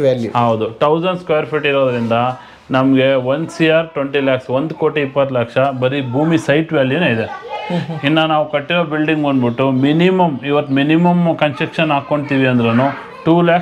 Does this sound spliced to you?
no; 0 cuts

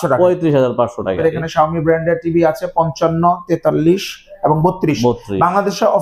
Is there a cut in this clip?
yes; 1 cut; at 1.2 s

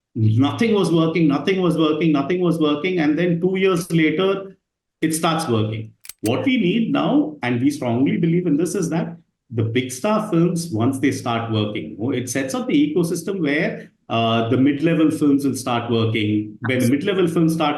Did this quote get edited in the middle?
no; 0 cuts

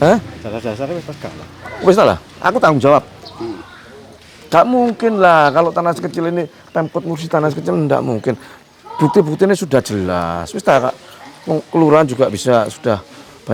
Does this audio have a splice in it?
no; 0 cuts

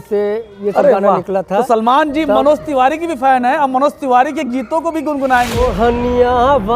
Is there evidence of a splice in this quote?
yes; 1 cut; at 5.5 s

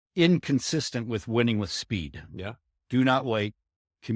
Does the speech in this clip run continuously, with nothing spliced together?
yes; 0 cuts

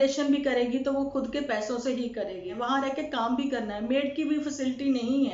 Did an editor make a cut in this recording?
yes; 1 cut; at 2.5 s

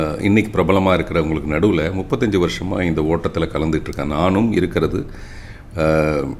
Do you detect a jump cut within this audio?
no; 0 cuts

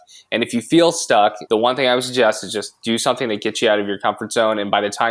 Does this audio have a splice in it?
yes; 1 cut; at 1.4 s

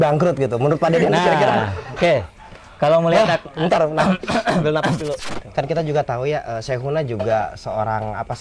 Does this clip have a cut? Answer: yes; 1 cut; at 5.3 s

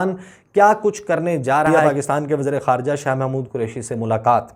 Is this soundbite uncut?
yes; 0 cuts

